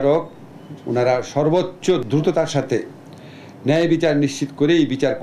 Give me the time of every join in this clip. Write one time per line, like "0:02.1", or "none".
0:02.0